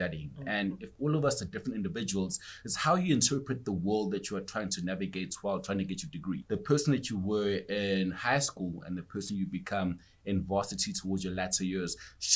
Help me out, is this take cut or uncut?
cut